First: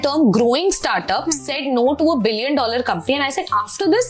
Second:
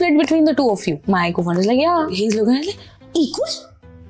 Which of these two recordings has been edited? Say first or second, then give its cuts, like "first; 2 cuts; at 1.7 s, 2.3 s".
second; 2 cuts; at 1.0 s, 2.1 s